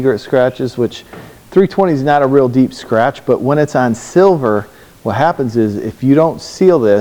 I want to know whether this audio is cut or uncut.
uncut